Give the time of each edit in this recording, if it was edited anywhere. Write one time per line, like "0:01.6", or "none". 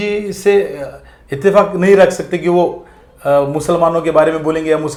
none

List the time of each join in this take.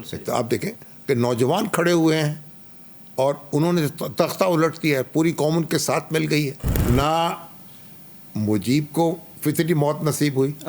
0:06.7

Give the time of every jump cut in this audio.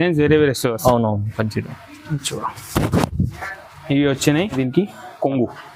0:04.5

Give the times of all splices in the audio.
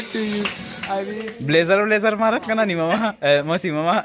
0:01.1

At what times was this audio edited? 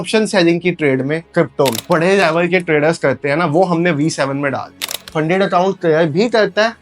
0:01.8
0:05.0

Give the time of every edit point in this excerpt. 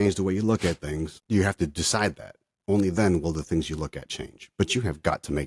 0:01.2

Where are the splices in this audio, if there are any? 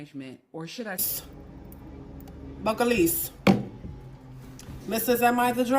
0:01.0

